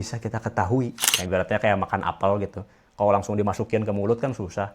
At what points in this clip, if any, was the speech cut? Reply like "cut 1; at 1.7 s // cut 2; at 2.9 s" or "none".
cut 1; at 1.1 s